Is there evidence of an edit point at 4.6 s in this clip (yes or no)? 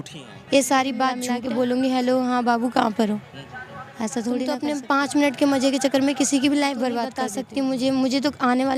yes